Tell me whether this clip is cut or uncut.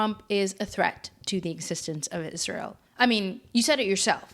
cut